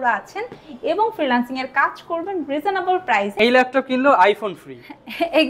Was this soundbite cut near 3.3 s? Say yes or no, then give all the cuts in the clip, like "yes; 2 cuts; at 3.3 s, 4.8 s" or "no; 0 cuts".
yes; 1 cut; at 3.3 s